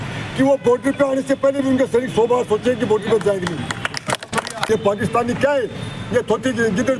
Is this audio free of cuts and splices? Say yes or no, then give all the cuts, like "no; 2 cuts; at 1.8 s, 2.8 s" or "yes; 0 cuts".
no; 1 cut; at 4.7 s